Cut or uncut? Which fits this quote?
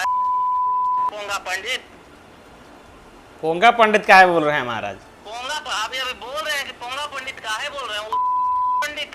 cut